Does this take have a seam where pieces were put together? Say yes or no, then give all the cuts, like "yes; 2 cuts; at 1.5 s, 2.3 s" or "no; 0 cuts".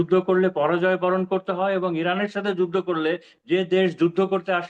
no; 0 cuts